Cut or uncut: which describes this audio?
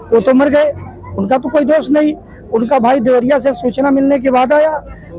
uncut